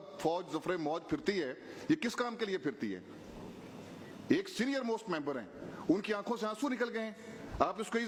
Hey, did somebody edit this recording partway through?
no; 0 cuts

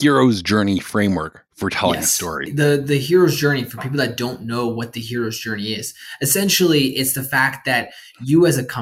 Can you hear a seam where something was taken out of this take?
yes; 1 cut; at 2.5 s

